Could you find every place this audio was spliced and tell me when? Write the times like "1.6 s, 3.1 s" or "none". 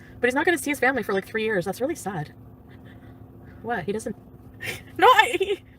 4.1 s